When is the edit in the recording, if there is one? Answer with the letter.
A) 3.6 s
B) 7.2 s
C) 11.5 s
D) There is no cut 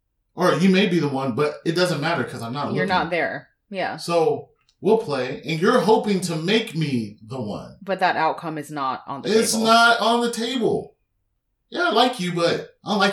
C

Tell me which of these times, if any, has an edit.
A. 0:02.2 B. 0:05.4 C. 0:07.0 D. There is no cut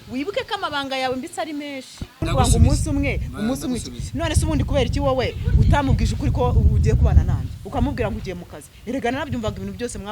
A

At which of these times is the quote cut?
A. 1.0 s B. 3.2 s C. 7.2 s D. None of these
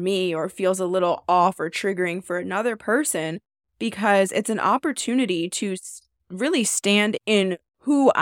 C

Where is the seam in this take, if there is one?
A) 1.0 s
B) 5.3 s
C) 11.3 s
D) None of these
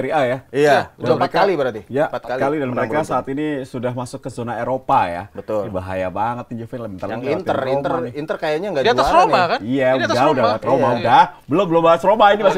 D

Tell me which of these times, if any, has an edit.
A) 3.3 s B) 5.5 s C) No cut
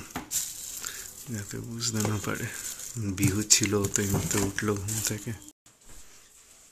B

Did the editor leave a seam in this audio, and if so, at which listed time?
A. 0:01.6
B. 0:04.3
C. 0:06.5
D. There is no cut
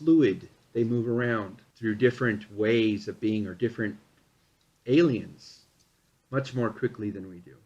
A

